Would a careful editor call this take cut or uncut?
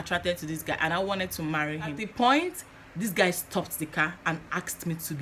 cut